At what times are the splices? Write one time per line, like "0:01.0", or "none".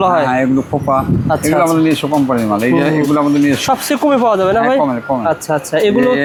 none